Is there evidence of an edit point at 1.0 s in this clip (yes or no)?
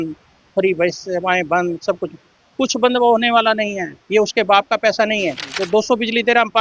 no